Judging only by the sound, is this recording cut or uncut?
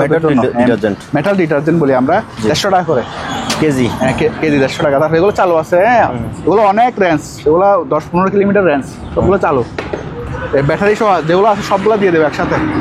uncut